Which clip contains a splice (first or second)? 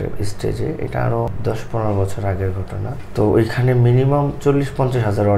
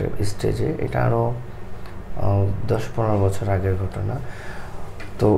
first